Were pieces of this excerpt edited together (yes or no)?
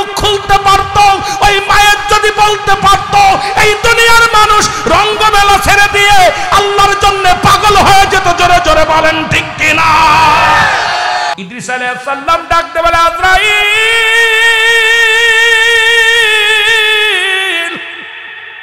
yes